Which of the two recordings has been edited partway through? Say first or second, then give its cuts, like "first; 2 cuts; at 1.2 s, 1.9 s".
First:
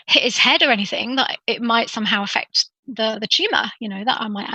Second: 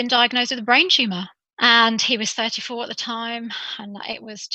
second; 1 cut; at 1.4 s